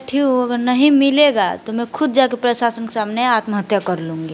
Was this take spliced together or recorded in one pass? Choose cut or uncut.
uncut